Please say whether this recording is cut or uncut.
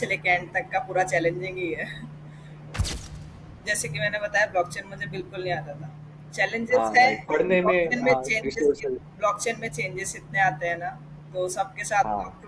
cut